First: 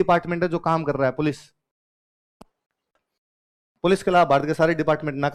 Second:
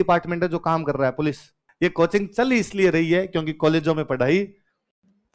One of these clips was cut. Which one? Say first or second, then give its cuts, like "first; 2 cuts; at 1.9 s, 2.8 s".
second; 1 cut; at 1.6 s